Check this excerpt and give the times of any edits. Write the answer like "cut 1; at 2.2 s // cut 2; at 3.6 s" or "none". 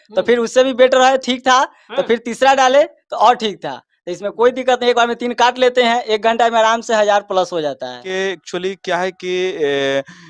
cut 1; at 8.0 s